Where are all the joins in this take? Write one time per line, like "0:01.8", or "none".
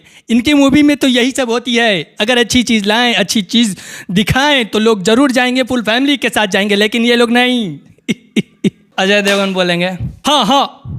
0:08.8
0:10.1